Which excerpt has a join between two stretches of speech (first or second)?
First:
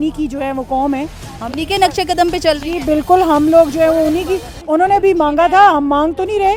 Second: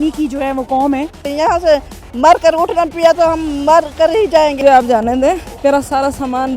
second